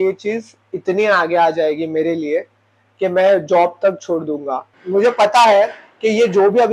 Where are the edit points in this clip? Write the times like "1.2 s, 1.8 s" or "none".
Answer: 4.7 s